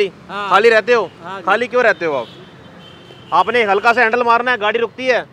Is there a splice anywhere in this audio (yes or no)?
no